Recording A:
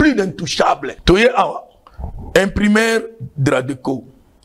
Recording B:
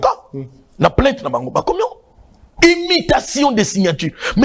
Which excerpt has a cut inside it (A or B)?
A